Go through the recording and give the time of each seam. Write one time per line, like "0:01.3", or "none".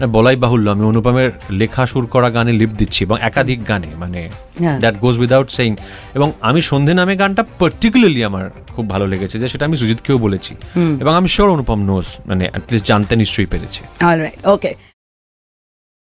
none

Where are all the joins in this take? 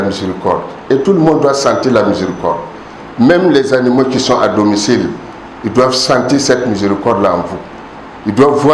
none

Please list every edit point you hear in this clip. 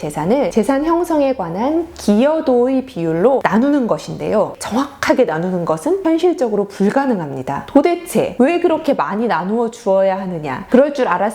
0:04.5
0:07.6

